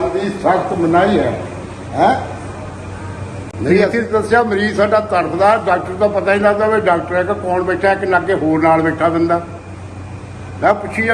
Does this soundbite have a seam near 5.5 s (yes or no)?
no